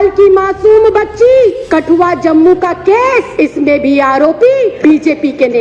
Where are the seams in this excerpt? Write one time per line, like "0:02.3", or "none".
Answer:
0:01.6
0:03.3
0:04.8